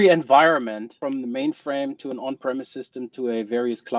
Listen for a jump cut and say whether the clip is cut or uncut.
cut